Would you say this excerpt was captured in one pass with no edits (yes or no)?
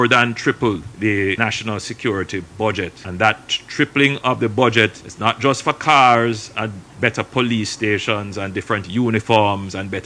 yes